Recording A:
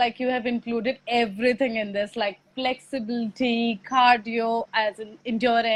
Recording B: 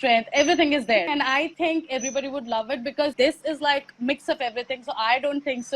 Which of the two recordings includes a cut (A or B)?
B